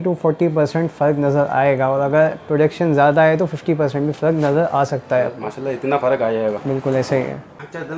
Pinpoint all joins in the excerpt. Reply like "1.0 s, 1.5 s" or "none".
none